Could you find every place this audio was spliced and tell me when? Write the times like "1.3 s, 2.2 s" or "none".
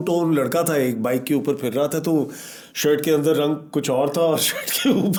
none